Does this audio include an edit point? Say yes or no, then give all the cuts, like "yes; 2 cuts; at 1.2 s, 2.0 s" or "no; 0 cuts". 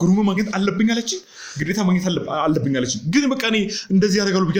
no; 0 cuts